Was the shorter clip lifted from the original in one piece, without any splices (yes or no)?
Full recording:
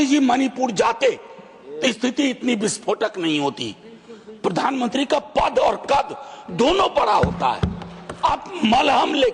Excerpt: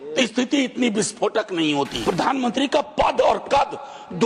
no